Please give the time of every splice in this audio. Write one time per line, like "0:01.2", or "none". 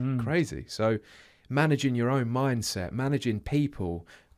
none